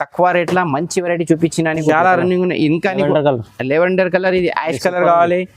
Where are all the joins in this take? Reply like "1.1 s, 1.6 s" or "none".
1.8 s

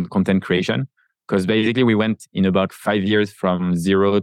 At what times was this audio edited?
2.7 s

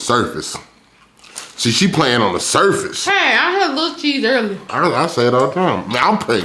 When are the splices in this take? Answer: 4.6 s

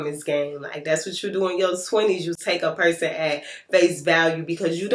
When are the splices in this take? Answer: none

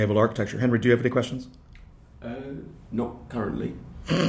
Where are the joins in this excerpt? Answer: none

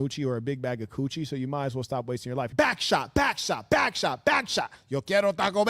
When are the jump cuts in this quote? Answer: 2.5 s

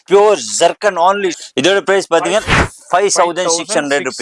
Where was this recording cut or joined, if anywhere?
1.4 s

